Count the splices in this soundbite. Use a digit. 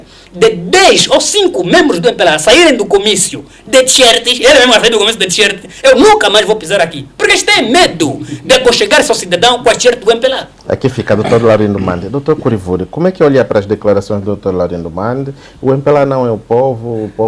0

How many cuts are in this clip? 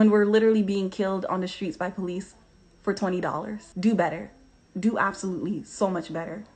1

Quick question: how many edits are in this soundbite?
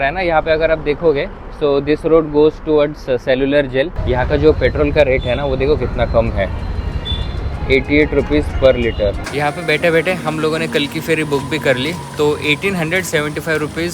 2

